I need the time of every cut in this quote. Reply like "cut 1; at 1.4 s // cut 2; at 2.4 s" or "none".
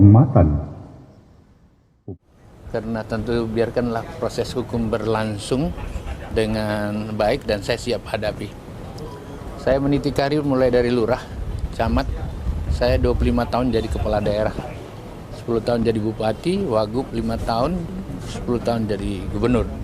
cut 1; at 2.0 s

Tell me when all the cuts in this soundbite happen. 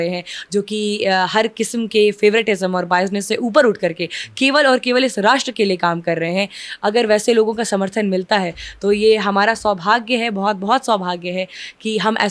none

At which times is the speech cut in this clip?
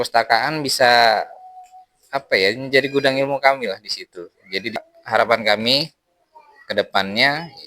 cut 1; at 4.8 s

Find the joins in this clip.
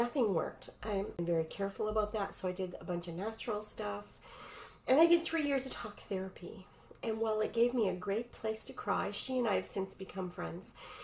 cut 1; at 1.1 s

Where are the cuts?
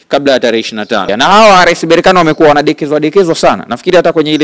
cut 1; at 1.1 s

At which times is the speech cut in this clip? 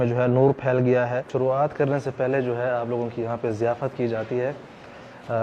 cut 1; at 1.2 s

